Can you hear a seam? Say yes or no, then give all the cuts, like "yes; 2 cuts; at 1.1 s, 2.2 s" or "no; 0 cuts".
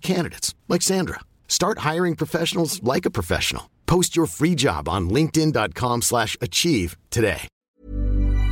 yes; 1 cut; at 7.5 s